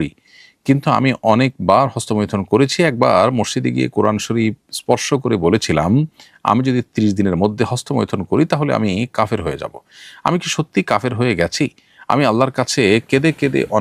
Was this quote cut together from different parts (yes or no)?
no